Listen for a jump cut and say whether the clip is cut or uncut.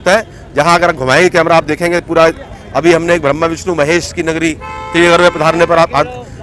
uncut